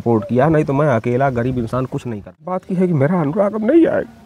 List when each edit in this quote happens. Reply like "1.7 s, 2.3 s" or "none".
2.6 s